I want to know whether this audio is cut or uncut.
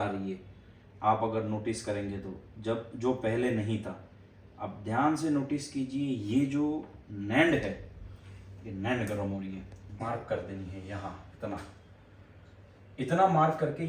cut